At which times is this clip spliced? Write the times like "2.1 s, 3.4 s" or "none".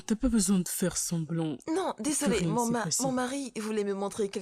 1.6 s